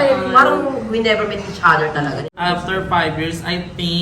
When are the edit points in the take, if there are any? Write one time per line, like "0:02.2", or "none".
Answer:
0:02.2